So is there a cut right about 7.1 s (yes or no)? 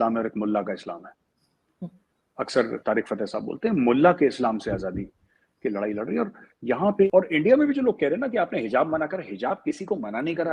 yes